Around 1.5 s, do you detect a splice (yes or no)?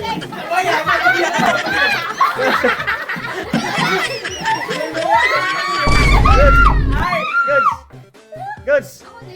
yes